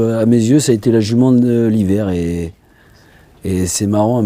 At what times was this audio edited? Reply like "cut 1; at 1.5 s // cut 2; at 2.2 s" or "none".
none